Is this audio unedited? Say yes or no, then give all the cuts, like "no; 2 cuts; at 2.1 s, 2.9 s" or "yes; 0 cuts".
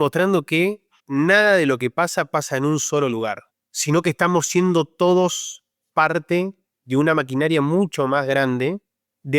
no; 1 cut; at 0.9 s